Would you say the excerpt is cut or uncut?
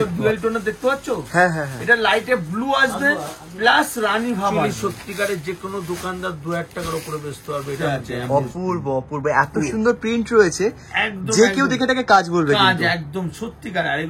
cut